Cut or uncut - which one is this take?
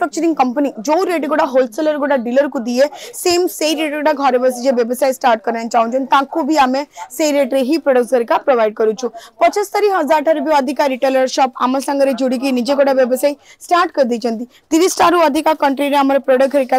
uncut